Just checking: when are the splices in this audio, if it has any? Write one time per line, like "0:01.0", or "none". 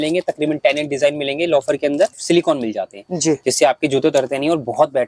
0:02.1